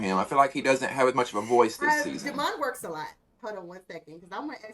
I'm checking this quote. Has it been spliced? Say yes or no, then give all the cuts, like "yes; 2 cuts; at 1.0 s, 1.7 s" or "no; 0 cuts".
yes; 1 cut; at 3.4 s